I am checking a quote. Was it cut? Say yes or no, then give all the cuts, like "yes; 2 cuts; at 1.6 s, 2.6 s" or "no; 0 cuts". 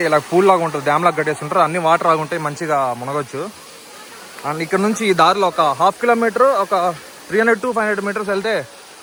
no; 0 cuts